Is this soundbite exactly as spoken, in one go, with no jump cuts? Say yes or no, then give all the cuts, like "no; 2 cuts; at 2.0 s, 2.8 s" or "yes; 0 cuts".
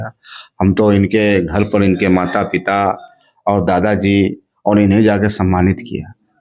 yes; 0 cuts